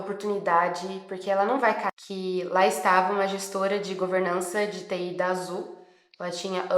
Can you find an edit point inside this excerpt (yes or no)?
yes